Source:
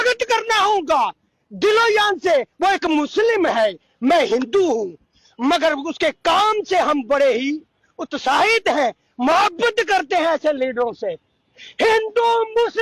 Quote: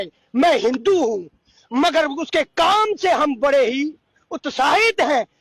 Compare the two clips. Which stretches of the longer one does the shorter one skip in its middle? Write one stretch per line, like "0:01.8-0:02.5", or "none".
none